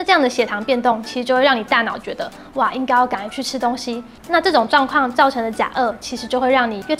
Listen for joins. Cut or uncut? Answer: uncut